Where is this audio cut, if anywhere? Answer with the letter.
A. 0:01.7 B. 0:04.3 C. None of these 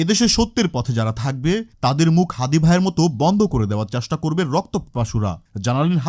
C